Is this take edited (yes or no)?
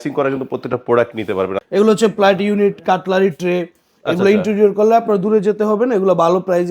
yes